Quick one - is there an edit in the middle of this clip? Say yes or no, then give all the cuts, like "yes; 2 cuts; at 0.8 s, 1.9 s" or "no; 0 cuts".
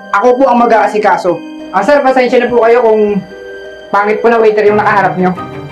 yes; 1 cut; at 1.5 s